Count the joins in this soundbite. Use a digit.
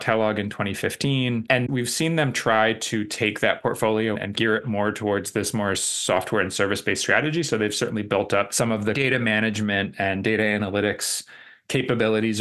2